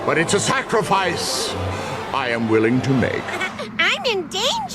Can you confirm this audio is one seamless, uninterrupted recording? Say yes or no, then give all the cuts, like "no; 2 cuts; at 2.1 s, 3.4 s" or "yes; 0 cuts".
no; 1 cut; at 3.4 s